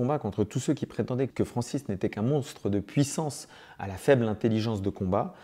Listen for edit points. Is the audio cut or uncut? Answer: cut